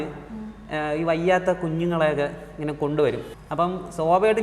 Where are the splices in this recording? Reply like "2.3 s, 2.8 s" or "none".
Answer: 3.3 s